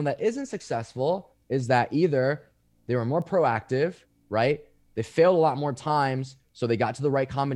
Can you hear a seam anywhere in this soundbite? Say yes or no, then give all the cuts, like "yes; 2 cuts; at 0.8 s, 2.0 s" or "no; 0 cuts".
no; 0 cuts